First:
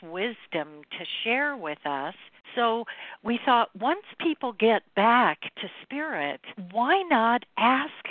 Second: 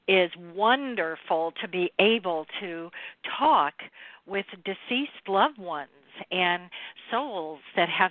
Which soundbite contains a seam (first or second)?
first